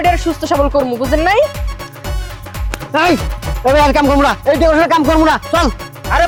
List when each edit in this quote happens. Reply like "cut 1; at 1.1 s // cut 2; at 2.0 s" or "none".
none